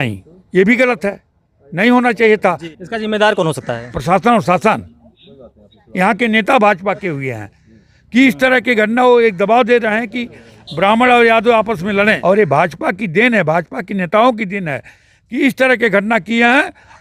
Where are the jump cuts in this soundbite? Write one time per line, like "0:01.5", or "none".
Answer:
0:02.7
0:12.2